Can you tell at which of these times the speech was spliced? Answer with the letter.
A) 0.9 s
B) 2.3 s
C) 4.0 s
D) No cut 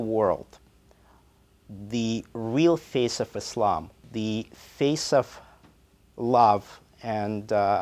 C